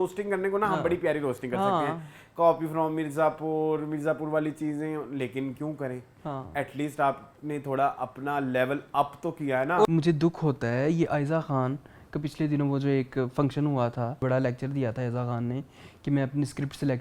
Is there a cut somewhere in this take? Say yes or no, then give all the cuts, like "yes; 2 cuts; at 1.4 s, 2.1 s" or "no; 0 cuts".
yes; 2 cuts; at 9.8 s, 14.2 s